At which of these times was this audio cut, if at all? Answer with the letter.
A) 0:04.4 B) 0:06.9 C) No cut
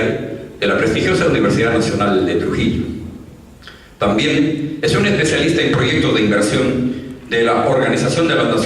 B